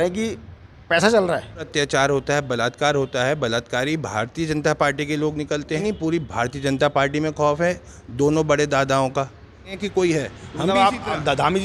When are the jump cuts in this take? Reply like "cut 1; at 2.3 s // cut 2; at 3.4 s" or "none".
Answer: cut 1; at 1.7 s // cut 2; at 5.8 s // cut 3; at 9.7 s